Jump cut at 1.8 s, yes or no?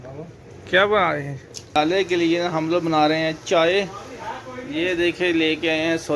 yes